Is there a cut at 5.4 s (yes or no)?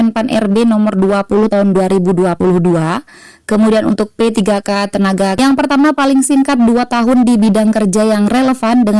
yes